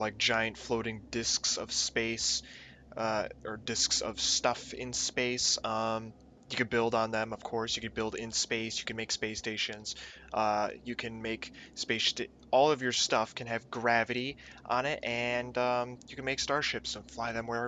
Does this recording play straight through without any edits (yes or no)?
no